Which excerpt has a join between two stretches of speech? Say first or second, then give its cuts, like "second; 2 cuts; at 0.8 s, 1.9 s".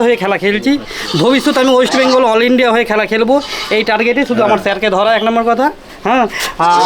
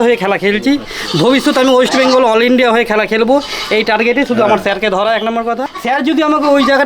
second; 1 cut; at 5.7 s